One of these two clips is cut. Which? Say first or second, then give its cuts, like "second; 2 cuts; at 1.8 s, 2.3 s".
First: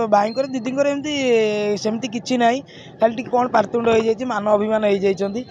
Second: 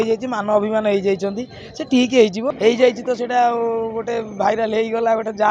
second; 1 cut; at 2.5 s